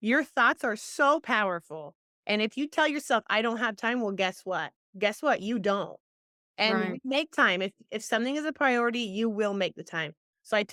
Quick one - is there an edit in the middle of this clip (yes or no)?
no